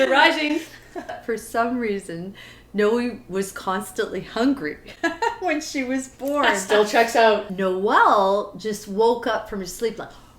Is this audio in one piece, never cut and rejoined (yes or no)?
no